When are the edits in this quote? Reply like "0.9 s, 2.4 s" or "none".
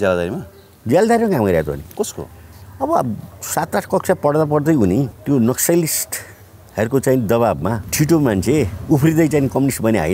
5.2 s, 7.8 s